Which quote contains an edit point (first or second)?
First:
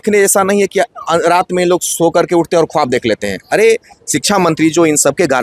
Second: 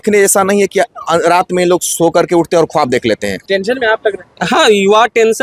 second